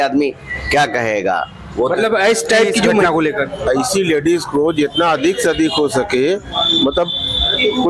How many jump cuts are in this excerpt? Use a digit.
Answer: 1